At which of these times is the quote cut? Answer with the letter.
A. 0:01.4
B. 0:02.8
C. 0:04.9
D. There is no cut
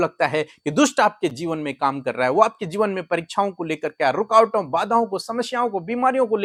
D